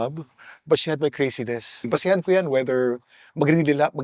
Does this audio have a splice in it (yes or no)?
yes